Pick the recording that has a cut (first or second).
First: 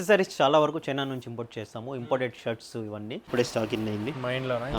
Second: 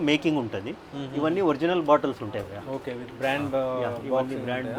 first